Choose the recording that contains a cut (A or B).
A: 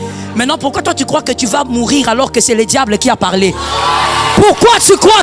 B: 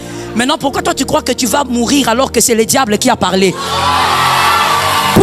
A